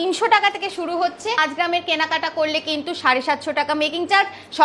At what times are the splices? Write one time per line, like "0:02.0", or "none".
0:01.4